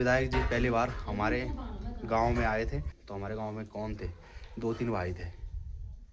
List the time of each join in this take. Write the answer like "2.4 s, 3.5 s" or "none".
none